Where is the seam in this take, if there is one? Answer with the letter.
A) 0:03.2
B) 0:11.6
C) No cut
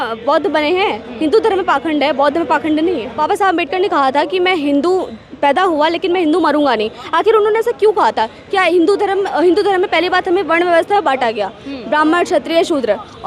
A